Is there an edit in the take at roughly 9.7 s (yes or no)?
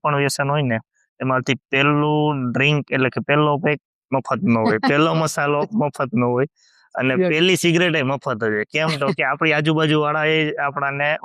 no